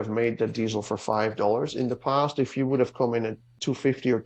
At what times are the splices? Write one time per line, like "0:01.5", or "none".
none